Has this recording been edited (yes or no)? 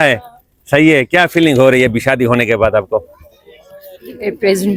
no